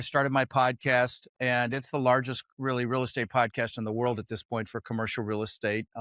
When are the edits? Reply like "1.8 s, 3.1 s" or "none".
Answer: 1.2 s